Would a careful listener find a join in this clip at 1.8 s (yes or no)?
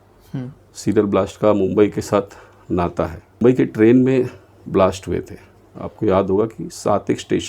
no